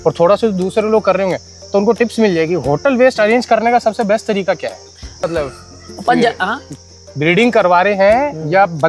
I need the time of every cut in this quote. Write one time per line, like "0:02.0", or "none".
0:05.3